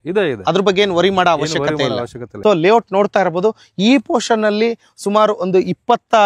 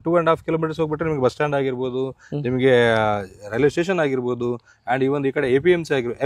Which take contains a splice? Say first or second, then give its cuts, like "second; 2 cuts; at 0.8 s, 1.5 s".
first; 1 cut; at 2.3 s